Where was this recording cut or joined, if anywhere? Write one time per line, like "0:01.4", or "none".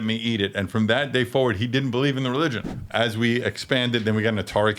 0:02.7